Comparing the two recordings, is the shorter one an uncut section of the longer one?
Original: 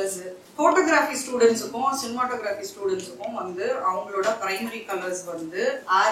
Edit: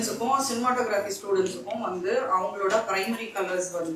yes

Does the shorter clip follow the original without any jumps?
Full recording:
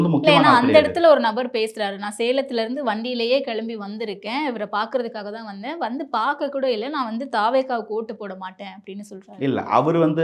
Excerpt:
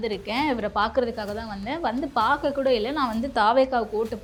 yes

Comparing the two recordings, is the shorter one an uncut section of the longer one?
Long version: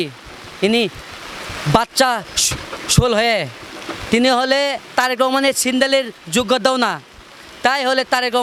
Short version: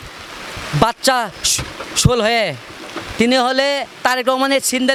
yes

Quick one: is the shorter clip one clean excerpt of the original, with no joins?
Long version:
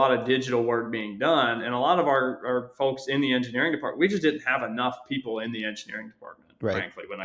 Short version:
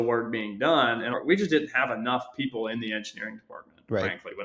no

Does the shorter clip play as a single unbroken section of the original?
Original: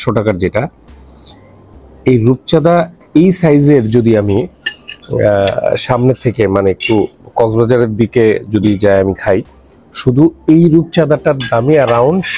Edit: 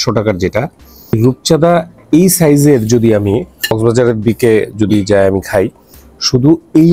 no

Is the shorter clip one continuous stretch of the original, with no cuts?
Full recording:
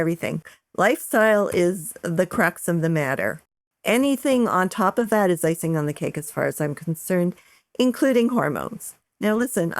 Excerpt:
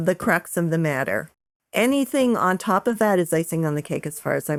yes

